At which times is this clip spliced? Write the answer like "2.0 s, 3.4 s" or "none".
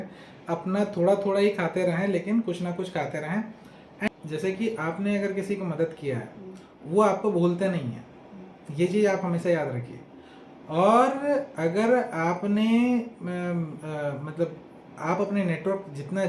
4.1 s